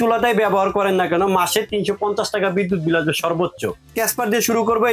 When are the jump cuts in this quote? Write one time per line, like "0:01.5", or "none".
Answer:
0:03.9